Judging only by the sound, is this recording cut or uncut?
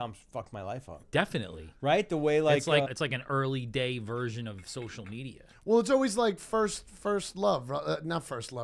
cut